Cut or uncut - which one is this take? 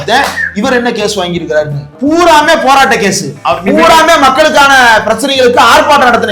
cut